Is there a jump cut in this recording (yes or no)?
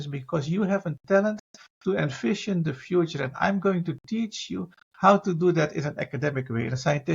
no